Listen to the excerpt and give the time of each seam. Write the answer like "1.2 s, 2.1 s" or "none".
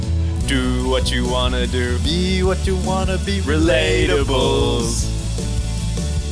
none